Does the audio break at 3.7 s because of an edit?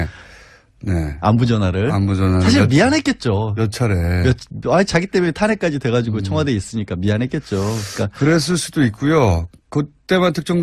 yes; 1 cut; at 3.7 s

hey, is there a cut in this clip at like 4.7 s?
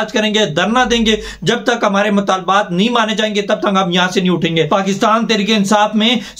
yes; 1 cut; at 4.7 s

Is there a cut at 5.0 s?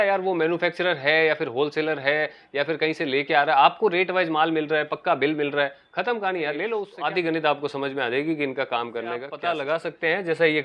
no; 2 cuts; at 6.9 s, 9.4 s

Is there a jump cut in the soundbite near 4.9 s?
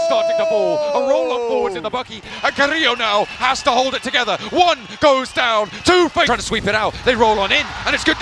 no; 2 cuts; at 2.3 s, 6.3 s

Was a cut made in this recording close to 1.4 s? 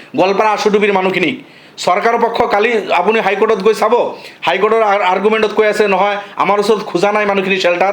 no; 0 cuts

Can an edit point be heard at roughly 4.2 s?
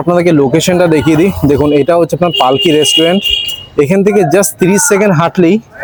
no; 0 cuts

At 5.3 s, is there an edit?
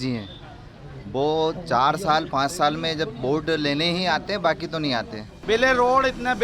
yes; 1 cut; at 5.3 s

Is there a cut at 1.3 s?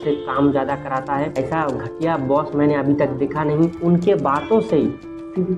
yes; 2 cuts; at 1.3 s, 3.8 s

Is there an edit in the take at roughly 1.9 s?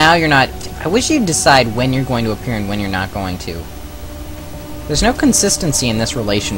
no; 0 cuts

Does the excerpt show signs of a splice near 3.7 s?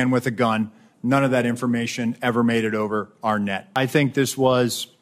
yes; 1 cut; at 3.7 s

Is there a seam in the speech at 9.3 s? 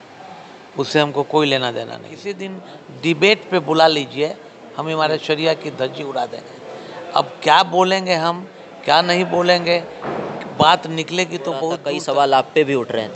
no; 2 cuts; at 1.7 s, 11.8 s

